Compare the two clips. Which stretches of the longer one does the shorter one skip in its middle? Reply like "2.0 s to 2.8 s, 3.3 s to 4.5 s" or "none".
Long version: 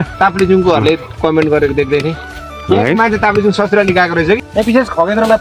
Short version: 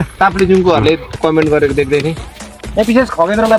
2.6 s to 4.4 s